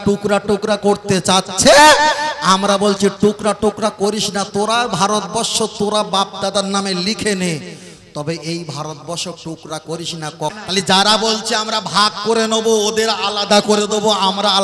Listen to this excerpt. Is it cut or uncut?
cut